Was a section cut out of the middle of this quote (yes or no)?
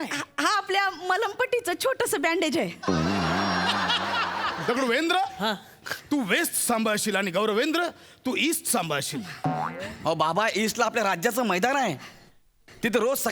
yes